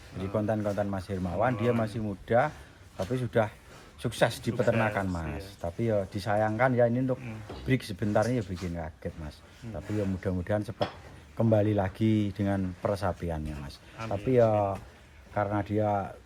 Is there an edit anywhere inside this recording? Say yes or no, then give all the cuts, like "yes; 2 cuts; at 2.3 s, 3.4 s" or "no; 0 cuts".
no; 0 cuts